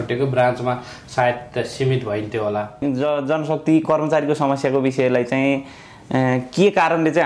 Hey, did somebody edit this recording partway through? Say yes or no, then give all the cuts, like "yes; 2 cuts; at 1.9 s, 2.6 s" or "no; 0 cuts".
yes; 1 cut; at 2.8 s